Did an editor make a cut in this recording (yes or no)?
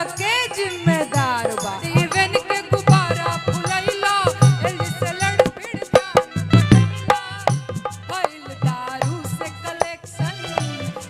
yes